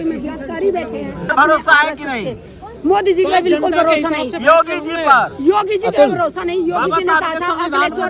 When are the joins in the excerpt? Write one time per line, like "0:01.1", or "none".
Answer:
0:01.3